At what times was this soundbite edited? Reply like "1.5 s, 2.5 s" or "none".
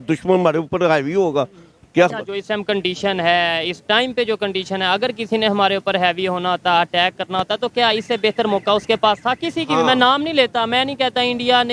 none